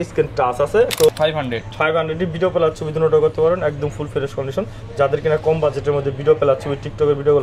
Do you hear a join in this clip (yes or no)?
yes